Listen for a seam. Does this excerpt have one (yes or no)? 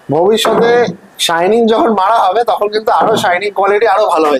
no